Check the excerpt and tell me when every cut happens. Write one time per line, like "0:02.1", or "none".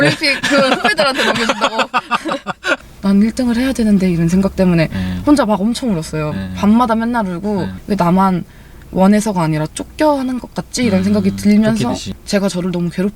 0:02.7
0:07.8
0:12.1